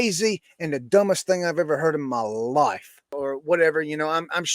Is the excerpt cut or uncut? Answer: cut